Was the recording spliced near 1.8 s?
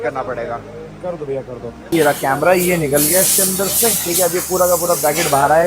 yes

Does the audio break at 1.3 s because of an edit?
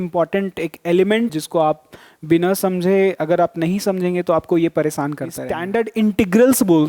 yes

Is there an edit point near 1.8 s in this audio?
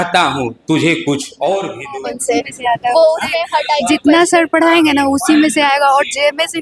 yes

